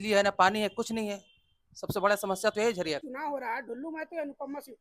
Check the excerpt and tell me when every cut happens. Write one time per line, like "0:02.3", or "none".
0:03.0